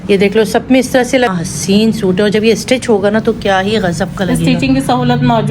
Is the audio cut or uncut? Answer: cut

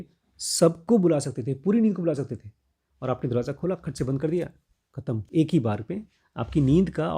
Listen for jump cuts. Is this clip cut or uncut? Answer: cut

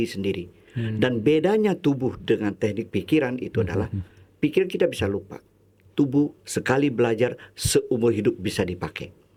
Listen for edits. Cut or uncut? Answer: uncut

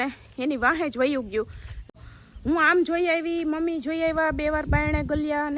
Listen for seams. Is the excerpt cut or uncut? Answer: cut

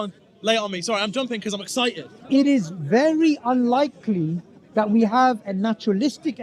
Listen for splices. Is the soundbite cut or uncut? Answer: cut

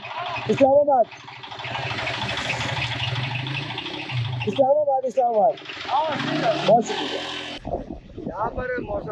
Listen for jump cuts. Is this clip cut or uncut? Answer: cut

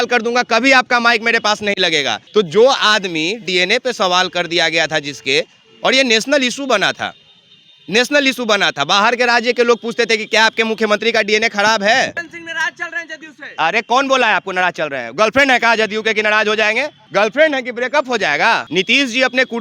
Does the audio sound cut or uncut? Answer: cut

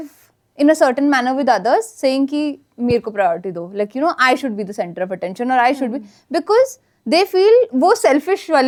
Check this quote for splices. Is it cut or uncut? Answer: uncut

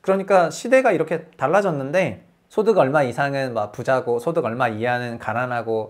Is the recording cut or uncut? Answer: uncut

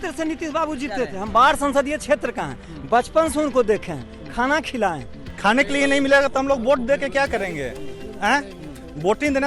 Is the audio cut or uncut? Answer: cut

